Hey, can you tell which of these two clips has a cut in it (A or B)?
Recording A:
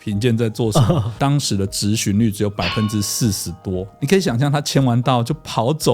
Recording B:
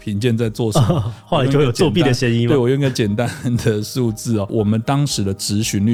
A